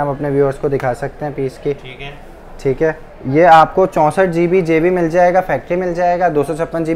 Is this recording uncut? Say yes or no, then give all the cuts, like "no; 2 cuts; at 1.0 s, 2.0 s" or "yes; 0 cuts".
no; 1 cut; at 3.1 s